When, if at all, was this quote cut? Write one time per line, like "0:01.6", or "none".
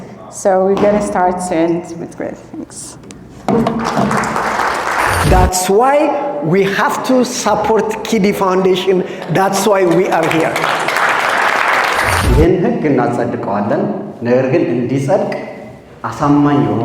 0:05.2
0:12.2